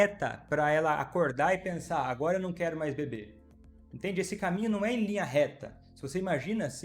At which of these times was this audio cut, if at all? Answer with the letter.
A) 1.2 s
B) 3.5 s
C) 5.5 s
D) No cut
D